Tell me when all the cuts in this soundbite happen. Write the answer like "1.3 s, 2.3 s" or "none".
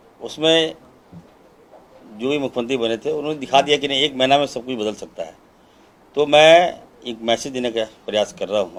none